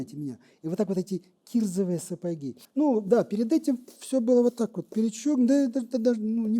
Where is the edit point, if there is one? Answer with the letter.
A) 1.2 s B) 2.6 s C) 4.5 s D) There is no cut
B